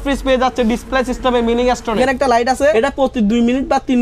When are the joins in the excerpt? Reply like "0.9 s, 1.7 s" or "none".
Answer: 2.0 s, 2.7 s